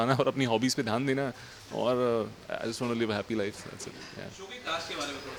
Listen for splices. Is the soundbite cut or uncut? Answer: uncut